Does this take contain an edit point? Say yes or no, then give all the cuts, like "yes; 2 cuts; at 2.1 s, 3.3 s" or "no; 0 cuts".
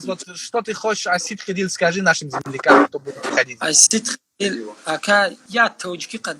yes; 1 cut; at 5.4 s